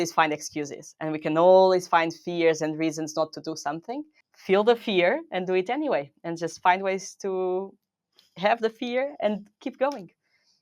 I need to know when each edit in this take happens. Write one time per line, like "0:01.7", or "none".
0:04.3